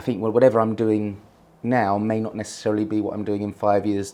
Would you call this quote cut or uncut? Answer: uncut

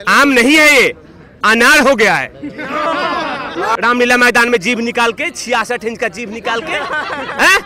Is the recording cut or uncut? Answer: cut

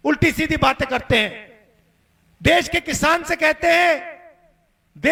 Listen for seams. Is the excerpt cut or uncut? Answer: uncut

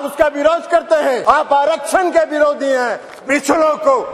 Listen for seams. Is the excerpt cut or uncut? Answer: cut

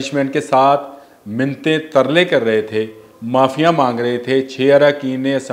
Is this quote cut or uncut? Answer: uncut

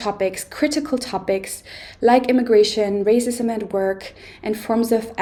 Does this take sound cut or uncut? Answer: uncut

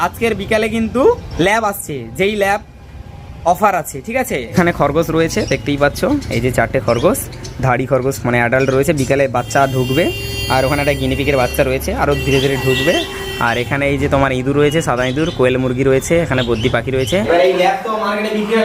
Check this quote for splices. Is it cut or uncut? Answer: cut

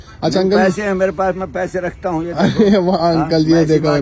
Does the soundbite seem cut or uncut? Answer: uncut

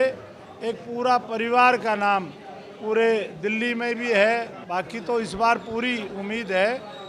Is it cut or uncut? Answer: cut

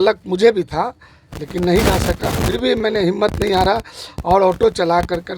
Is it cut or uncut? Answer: uncut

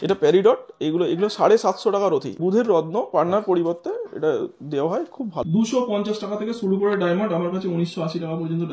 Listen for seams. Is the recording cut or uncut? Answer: cut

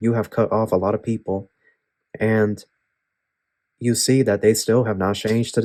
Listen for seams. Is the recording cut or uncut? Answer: uncut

